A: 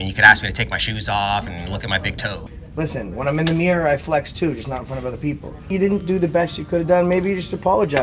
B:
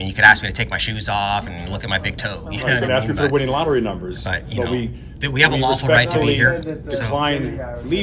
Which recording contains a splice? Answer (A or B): A